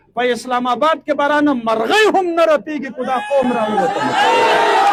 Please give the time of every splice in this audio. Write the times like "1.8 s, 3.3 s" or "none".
none